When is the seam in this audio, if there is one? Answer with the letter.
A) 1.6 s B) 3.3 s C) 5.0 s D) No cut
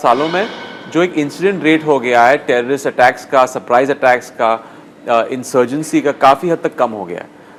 D